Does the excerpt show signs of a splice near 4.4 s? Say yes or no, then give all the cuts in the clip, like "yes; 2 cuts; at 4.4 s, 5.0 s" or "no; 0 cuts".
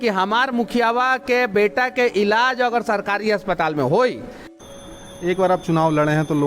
yes; 1 cut; at 4.4 s